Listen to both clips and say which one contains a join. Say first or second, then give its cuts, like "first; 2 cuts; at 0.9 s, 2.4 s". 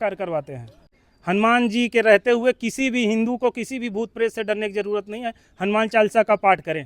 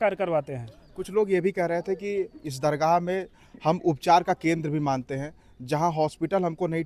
first; 1 cut; at 1.0 s